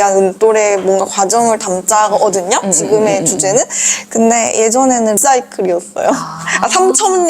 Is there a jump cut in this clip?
yes; 1 cut; at 5.2 s

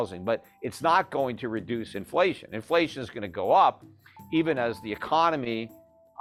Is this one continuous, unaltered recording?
yes; 0 cuts

